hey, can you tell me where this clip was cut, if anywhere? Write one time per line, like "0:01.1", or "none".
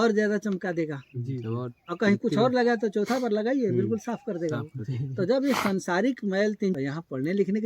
0:06.8